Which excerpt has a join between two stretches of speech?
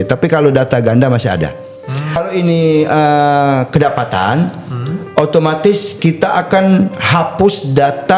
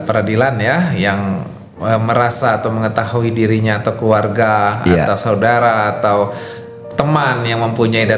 first; 1 cut; at 2.2 s

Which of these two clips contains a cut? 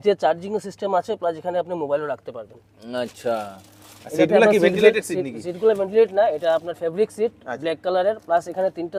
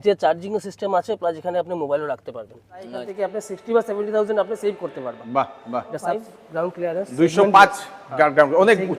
second; 2 cuts; at 3.0 s, 6.2 s

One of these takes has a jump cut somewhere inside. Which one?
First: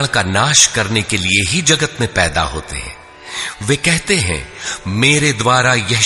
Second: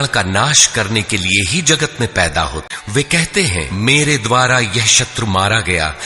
second; 2 cuts; at 2.7 s, 3.7 s

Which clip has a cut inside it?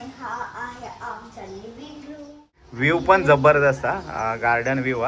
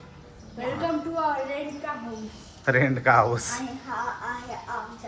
first; 1 cut; at 2.7 s

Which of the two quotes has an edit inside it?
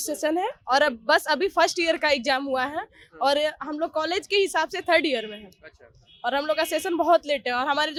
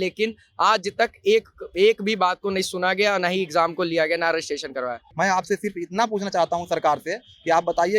second; 1 cut; at 5.0 s

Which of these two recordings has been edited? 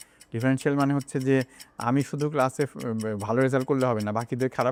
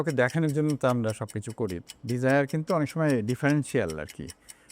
second; 1 cut; at 1.8 s

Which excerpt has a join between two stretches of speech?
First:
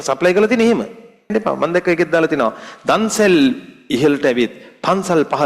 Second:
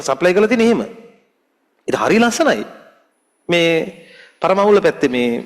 first; 1 cut; at 1.3 s

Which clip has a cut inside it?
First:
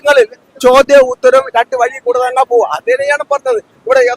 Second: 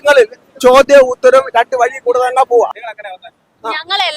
second; 1 cut; at 2.8 s

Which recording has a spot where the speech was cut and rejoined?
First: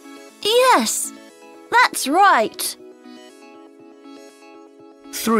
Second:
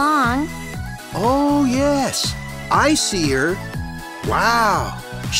first; 2 cuts; at 2.8 s, 4.7 s

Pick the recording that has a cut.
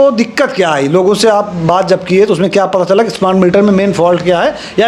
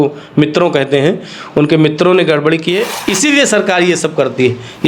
second; 1 cut; at 2.9 s

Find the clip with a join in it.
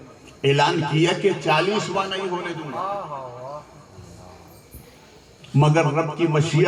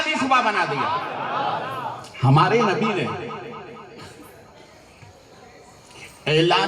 second; 1 cut; at 2.1 s

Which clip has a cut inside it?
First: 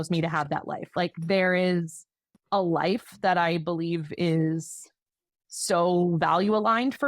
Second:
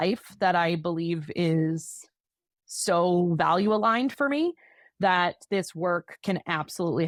first; 1 cut; at 0.9 s

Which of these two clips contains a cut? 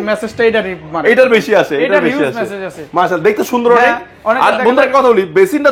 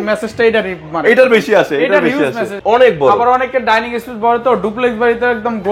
second; 1 cut; at 2.6 s

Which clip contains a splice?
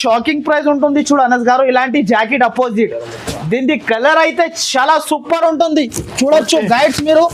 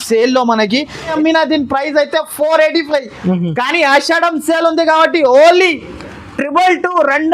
second; 1 cut; at 1.1 s

